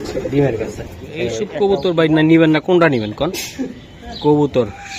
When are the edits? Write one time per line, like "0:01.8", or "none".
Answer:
0:01.4